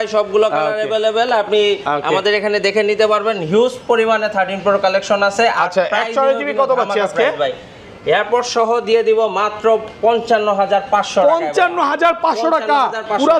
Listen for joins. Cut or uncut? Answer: uncut